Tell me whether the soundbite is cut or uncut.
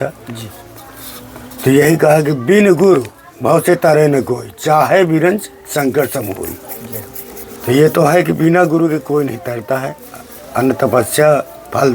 uncut